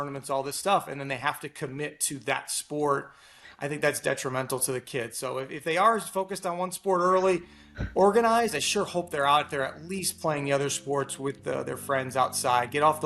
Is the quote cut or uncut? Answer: uncut